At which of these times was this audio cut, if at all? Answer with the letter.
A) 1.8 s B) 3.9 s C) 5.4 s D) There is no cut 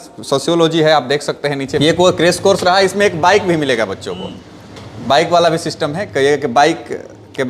A